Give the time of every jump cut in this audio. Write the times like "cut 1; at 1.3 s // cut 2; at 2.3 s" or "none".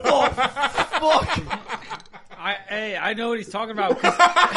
none

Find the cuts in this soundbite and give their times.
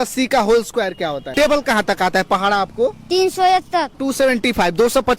cut 1; at 1.3 s // cut 2; at 4.0 s

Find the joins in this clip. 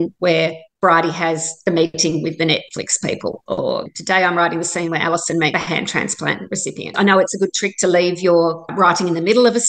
cut 1; at 6.9 s

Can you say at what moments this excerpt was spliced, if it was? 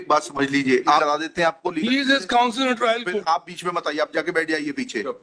cut 1; at 1.0 s

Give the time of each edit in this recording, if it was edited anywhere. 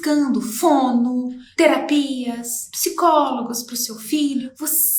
none

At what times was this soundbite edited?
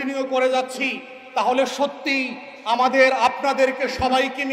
none

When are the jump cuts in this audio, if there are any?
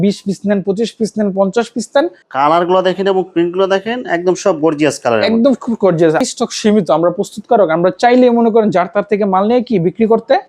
cut 1; at 2.2 s // cut 2; at 6.3 s

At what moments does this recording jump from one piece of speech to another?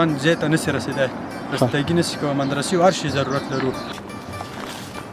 cut 1; at 3.9 s

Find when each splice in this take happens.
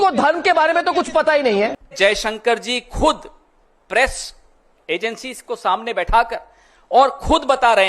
cut 1; at 1.7 s

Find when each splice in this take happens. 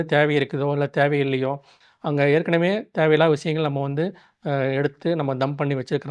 cut 1; at 1.8 s

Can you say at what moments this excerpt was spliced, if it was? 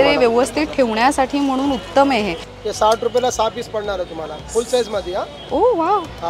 cut 1; at 2.4 s

